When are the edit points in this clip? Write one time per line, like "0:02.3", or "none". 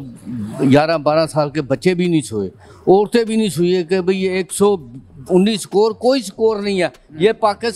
none